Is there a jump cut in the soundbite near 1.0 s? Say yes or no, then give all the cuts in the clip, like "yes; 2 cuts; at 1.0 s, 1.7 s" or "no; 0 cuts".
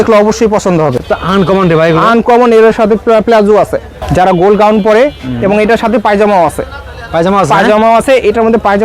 yes; 2 cuts; at 1.0 s, 3.9 s